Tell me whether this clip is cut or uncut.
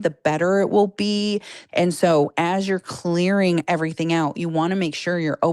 cut